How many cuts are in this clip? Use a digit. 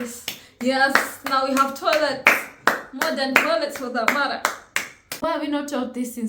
1